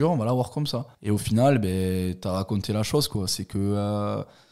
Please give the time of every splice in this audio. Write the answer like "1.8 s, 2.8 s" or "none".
none